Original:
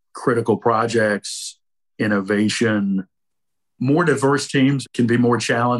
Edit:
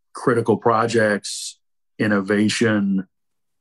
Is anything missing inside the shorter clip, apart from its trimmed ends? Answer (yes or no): no